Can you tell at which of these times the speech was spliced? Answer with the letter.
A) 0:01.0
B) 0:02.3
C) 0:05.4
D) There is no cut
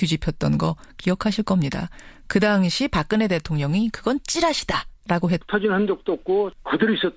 D